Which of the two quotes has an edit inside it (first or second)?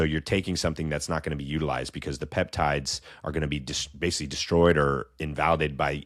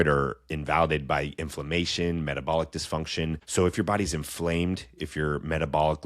second